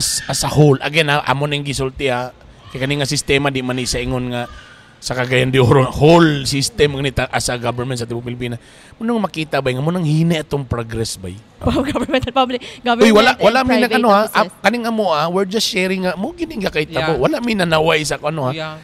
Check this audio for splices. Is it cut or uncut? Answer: cut